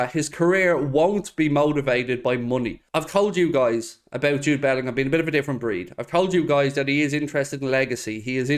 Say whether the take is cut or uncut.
cut